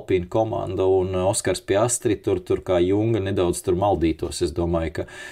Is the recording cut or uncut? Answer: uncut